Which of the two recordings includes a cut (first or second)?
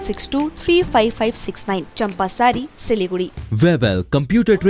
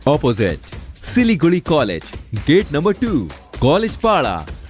first